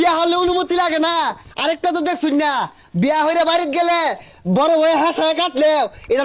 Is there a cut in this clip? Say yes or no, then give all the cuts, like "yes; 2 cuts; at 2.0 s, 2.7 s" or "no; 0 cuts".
no; 0 cuts